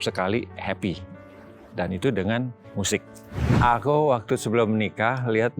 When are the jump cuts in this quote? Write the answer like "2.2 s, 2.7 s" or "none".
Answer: 3.5 s